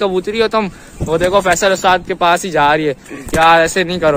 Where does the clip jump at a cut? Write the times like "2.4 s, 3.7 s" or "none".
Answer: none